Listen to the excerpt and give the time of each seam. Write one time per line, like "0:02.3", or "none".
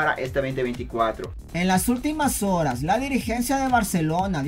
none